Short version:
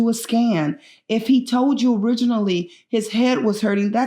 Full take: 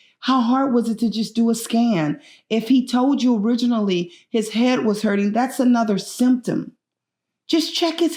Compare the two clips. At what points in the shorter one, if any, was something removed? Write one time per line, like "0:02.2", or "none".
none